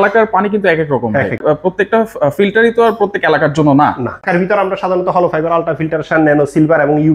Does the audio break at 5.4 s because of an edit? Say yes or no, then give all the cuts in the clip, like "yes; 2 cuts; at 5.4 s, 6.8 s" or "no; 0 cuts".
no; 2 cuts; at 1.4 s, 4.2 s